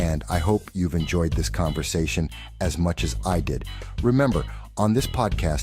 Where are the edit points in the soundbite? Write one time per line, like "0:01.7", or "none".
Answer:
0:01.0